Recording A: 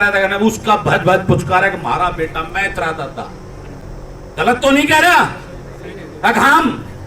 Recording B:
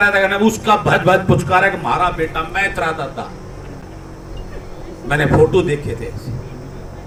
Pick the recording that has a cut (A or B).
A